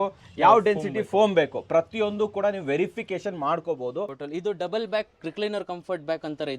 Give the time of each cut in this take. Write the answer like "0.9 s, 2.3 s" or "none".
4.2 s